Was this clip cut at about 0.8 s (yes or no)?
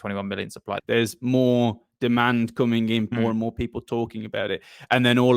yes